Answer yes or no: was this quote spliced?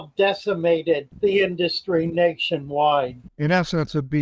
yes